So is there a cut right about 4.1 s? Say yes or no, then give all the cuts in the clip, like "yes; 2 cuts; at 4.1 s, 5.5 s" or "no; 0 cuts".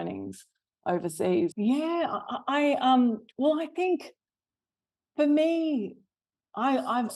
no; 1 cut; at 1.5 s